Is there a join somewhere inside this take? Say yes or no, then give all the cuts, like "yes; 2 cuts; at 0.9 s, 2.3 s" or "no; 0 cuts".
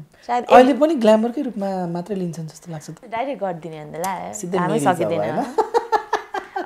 yes; 1 cut; at 3.0 s